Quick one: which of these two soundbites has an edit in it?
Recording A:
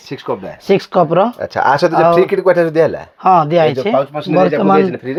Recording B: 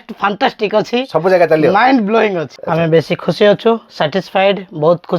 B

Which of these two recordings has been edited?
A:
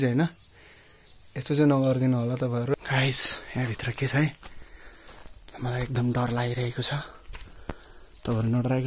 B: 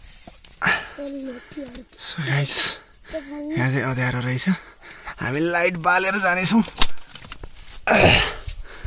A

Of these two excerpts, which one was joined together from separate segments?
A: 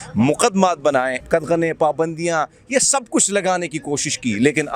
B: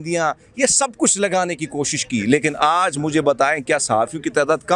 A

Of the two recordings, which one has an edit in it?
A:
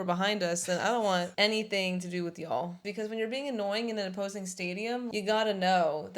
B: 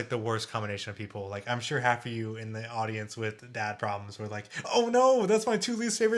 A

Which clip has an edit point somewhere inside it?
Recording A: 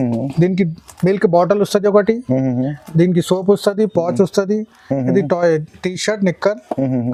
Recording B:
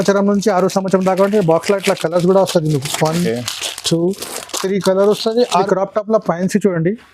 B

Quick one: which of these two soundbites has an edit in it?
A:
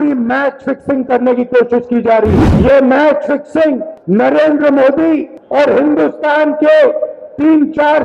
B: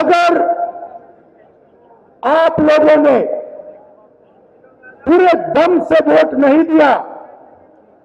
A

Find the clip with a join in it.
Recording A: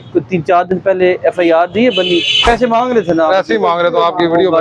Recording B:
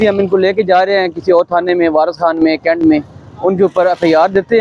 A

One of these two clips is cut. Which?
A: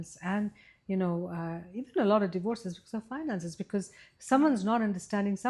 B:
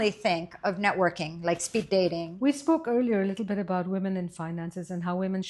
B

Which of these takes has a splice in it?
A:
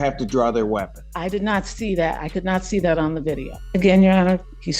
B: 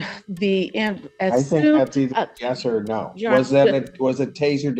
A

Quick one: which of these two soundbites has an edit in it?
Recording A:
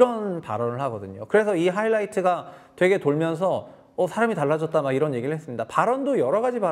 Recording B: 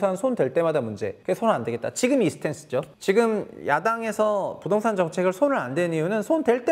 B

